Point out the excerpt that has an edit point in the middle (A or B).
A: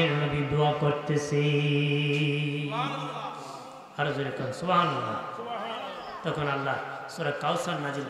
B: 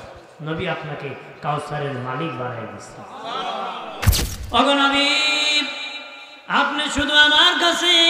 B